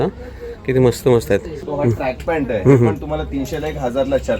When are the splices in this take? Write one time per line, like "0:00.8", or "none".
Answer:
0:01.6